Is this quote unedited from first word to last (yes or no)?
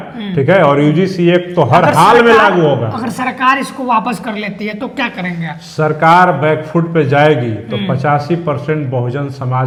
yes